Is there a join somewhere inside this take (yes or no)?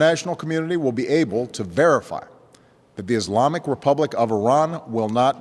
no